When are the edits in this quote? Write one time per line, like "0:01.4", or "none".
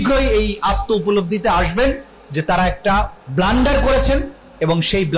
0:03.2